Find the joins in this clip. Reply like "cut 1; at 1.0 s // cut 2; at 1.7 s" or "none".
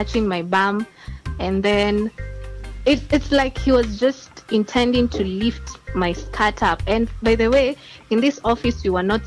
none